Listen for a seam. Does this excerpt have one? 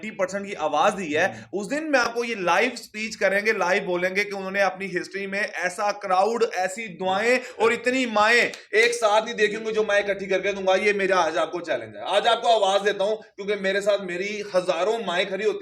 no; 0 cuts

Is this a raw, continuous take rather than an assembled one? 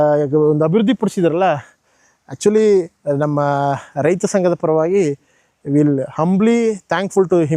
yes; 0 cuts

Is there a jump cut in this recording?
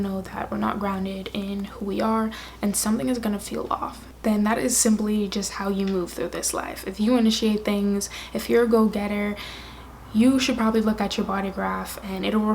yes; 1 cut; at 4.2 s

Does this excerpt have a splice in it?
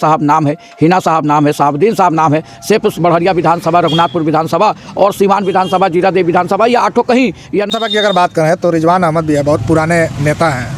yes; 1 cut; at 7.7 s

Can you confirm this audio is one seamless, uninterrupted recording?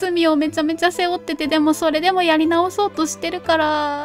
yes; 0 cuts

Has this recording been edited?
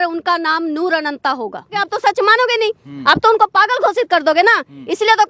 yes; 1 cut; at 1.9 s

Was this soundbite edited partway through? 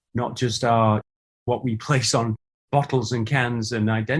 no; 0 cuts

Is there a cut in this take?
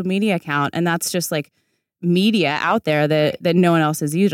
no; 0 cuts

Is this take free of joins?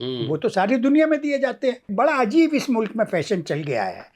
no; 1 cut; at 1.9 s

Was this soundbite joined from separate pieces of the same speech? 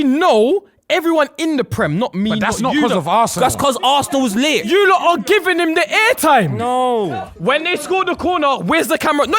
yes; 3 cuts; at 3.3 s, 4.7 s, 7.0 s

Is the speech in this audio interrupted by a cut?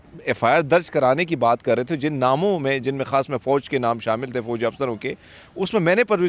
no; 0 cuts

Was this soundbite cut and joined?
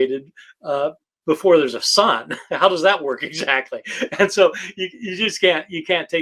no; 0 cuts

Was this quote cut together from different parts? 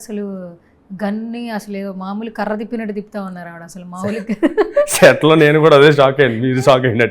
no; 0 cuts

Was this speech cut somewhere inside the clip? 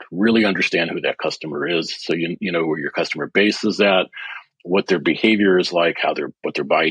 no; 0 cuts

